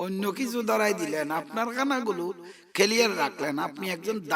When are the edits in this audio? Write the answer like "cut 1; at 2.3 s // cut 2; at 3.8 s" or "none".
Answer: none